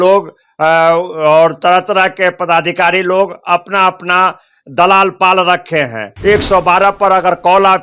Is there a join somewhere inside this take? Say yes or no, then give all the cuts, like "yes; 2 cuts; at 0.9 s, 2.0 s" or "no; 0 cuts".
yes; 1 cut; at 6.1 s